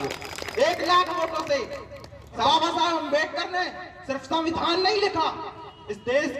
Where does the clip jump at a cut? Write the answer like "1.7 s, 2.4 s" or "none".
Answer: 2.4 s